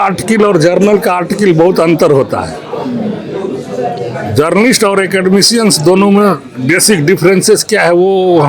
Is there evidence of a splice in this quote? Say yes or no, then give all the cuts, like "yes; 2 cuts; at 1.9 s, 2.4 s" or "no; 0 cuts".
no; 0 cuts